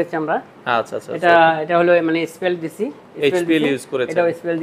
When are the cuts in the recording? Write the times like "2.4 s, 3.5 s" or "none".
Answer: none